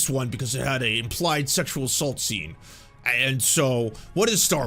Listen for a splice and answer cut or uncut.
uncut